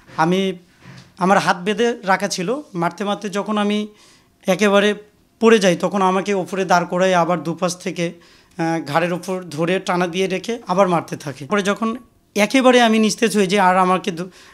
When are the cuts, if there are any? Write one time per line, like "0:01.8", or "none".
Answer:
0:11.5